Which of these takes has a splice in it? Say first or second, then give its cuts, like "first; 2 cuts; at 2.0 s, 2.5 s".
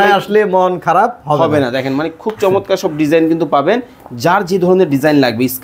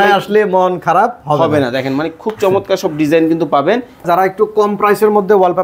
second; 1 cut; at 4.1 s